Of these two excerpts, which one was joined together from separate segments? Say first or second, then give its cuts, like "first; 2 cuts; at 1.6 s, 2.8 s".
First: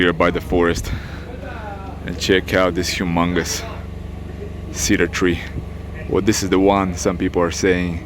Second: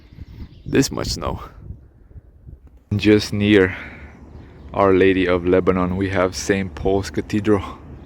second; 1 cut; at 2.9 s